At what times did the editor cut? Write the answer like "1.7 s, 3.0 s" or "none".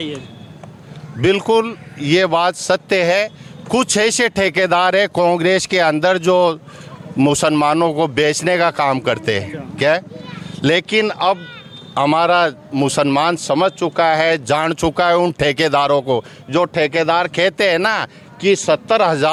none